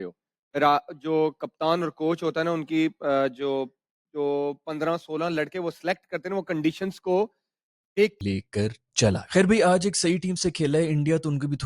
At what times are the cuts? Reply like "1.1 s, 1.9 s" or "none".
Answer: 8.2 s